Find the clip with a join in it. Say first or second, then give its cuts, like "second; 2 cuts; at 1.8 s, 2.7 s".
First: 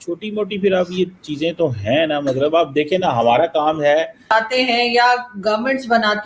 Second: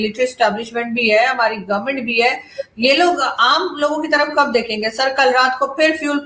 first; 1 cut; at 4.3 s